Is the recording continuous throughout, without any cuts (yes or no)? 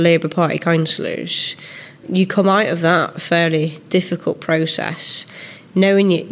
no